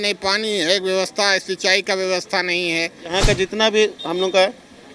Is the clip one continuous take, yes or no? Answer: no